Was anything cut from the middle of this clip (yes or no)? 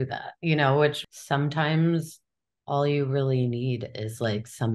yes